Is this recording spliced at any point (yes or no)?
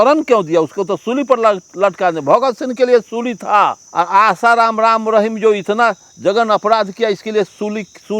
yes